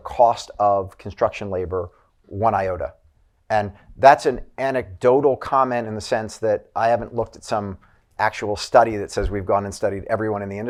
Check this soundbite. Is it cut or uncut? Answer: uncut